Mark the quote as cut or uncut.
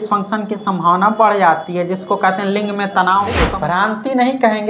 cut